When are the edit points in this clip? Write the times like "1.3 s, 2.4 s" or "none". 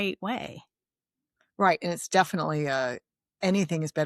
none